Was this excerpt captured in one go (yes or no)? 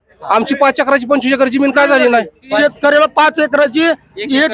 no